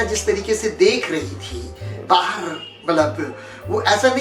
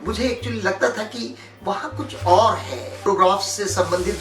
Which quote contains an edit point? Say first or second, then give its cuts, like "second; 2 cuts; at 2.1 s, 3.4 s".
second; 1 cut; at 3.0 s